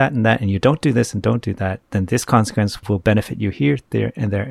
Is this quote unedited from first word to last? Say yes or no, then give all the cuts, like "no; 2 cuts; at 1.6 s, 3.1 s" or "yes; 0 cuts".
no; 1 cut; at 2.8 s